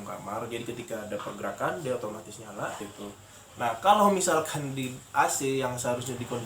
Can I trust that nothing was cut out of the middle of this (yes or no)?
no